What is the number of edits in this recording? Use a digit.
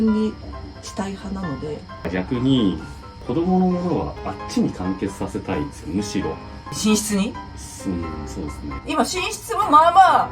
2